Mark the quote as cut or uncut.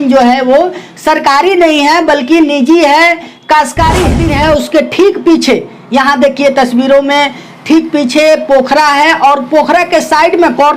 cut